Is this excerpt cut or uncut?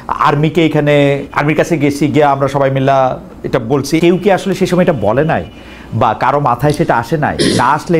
cut